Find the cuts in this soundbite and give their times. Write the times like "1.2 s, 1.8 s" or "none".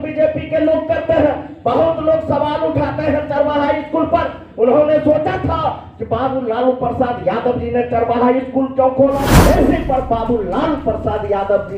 9.3 s